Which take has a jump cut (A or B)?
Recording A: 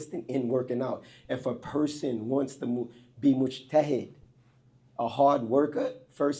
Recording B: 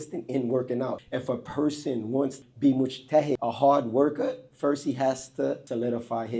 B